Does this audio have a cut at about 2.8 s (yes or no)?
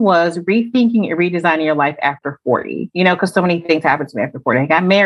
yes